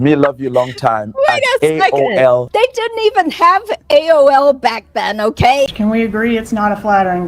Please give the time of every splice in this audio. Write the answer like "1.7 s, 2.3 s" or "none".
2.5 s, 5.7 s